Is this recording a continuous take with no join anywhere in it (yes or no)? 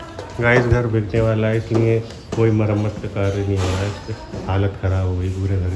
yes